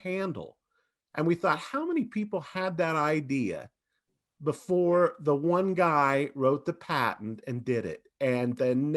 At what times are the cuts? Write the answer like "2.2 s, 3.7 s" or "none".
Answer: none

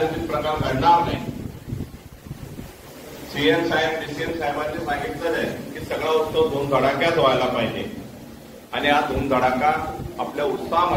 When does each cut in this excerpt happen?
none

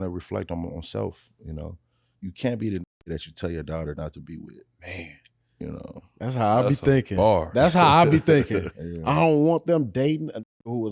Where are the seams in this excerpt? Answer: 2.1 s, 4.7 s, 8.7 s

